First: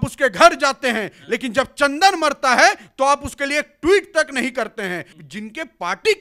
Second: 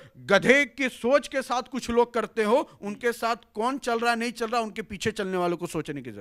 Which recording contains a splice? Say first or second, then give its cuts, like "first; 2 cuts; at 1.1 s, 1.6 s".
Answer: first; 1 cut; at 5.1 s